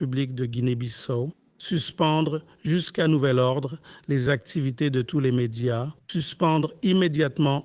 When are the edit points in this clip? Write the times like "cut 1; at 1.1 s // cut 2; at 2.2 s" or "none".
cut 1; at 1.5 s // cut 2; at 6.0 s